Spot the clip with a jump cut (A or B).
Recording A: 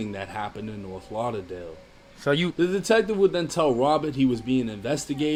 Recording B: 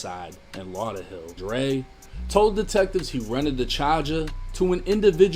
B